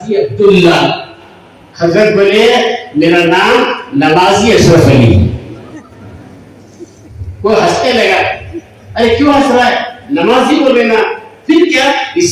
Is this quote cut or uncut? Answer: uncut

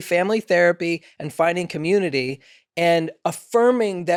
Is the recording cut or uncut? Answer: uncut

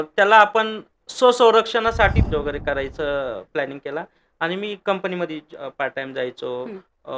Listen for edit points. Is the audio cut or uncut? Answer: cut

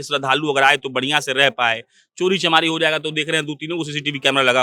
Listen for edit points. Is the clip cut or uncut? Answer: uncut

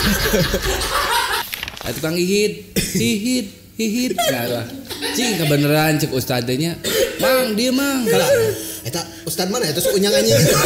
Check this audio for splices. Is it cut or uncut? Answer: cut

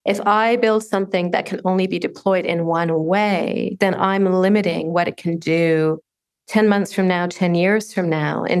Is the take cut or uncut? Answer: uncut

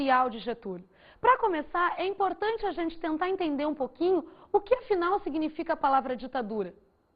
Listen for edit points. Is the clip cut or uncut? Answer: cut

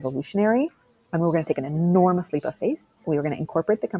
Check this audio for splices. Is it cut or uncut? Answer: cut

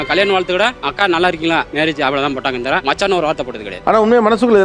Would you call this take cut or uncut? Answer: uncut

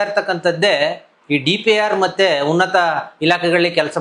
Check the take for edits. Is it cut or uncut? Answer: uncut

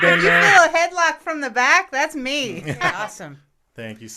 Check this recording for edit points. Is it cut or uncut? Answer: cut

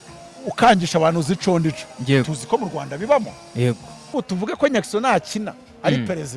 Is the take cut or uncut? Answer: cut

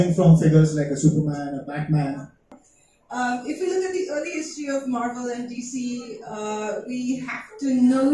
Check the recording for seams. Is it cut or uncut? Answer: cut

